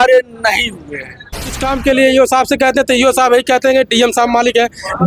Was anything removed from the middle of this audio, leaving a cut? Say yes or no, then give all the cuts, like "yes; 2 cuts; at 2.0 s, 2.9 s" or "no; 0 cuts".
yes; 1 cut; at 1.6 s